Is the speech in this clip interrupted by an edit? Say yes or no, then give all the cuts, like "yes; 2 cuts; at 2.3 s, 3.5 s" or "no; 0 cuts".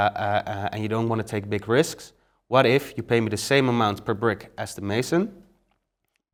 no; 0 cuts